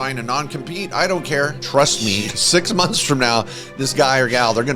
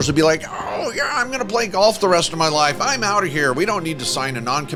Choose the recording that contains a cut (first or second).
first